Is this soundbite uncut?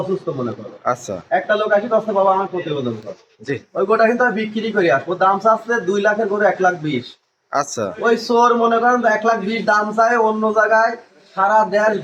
yes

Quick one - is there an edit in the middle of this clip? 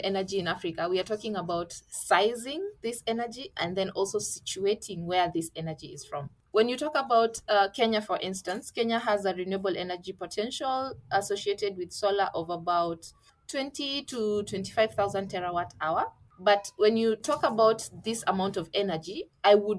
no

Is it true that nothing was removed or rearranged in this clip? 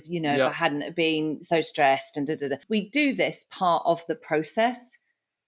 no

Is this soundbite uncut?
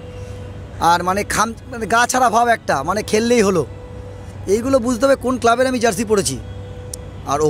yes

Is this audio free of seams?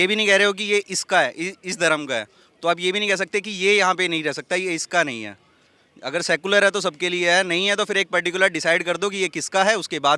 yes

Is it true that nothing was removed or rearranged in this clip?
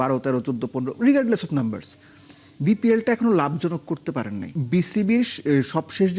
no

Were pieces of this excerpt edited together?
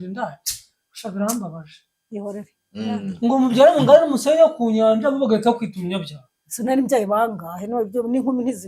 no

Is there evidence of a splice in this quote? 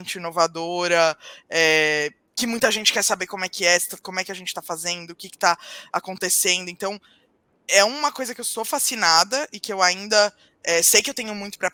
no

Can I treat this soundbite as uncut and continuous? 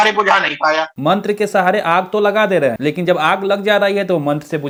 yes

